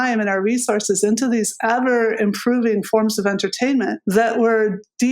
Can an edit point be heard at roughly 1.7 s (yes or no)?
no